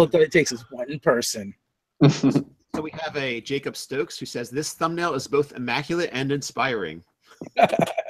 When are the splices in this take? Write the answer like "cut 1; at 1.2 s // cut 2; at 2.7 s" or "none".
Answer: cut 1; at 4.4 s